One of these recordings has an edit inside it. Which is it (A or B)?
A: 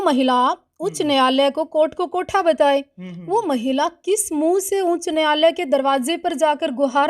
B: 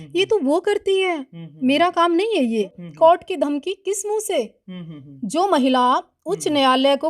B